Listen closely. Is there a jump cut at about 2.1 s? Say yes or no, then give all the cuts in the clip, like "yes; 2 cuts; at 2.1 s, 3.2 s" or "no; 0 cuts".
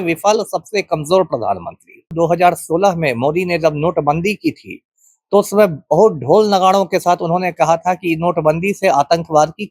yes; 1 cut; at 2.1 s